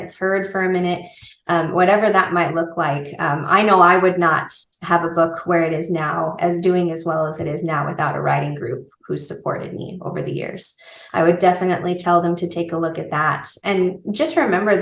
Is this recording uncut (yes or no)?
no